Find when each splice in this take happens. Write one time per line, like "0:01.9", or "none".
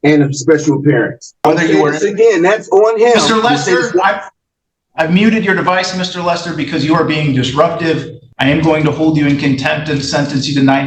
0:01.5
0:08.2